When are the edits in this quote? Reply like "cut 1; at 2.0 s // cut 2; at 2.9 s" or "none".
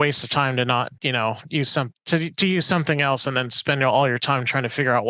cut 1; at 0.9 s